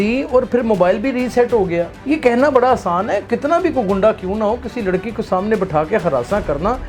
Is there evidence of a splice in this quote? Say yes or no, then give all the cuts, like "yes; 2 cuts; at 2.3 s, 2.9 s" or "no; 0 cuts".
yes; 2 cuts; at 2.0 s, 3.3 s